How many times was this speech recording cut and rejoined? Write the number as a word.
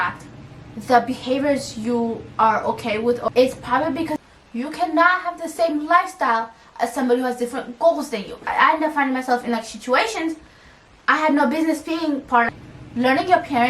four